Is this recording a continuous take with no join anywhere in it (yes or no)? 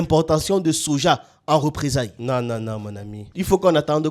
no